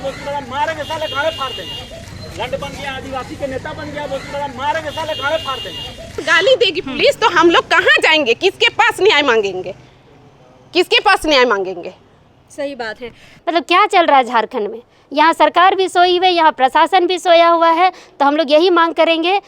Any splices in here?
yes; 3 cuts; at 2.2 s, 6.2 s, 13.3 s

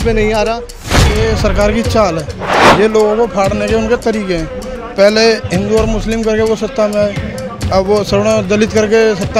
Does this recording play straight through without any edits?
no; 1 cut; at 0.9 s

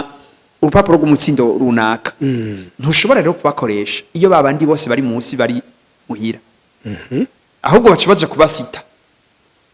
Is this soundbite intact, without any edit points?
yes; 0 cuts

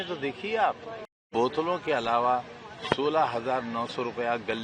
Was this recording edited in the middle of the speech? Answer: yes; 1 cut; at 1.3 s

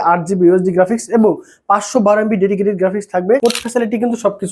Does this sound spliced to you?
yes; 1 cut; at 3.4 s

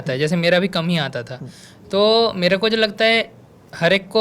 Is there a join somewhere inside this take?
no; 0 cuts

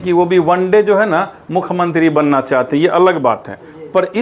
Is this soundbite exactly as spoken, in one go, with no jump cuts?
yes; 0 cuts

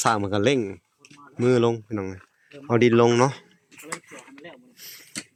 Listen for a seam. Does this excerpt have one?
no; 0 cuts

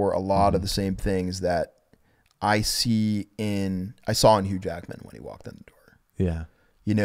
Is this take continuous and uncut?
yes; 0 cuts

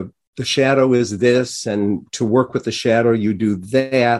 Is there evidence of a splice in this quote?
no; 0 cuts

